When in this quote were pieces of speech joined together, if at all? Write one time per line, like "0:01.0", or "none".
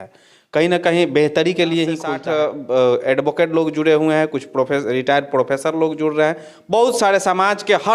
0:02.1